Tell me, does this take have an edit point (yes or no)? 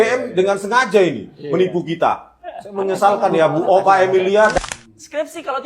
yes